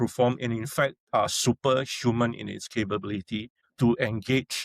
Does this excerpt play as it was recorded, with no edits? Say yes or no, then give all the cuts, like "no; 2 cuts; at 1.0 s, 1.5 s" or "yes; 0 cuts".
no; 1 cut; at 3.6 s